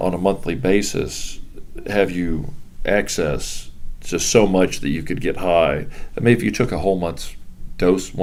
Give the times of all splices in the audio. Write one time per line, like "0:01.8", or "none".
none